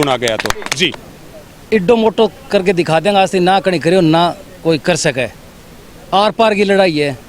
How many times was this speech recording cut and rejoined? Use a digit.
1